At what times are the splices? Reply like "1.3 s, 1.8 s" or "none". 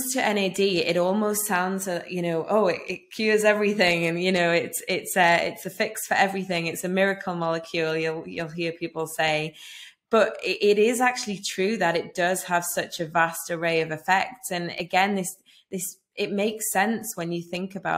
none